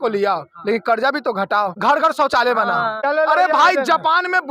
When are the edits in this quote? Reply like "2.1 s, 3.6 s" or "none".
1.8 s, 3.0 s